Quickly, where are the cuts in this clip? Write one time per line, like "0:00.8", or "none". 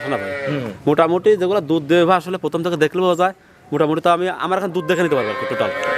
none